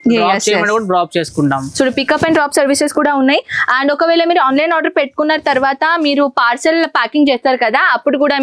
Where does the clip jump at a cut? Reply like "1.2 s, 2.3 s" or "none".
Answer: none